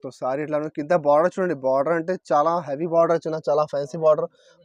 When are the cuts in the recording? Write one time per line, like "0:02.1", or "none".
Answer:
none